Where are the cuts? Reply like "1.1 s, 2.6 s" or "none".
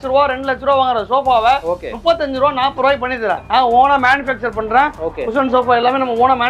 3.4 s